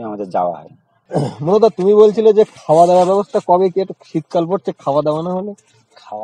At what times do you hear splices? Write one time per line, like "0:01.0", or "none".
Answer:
none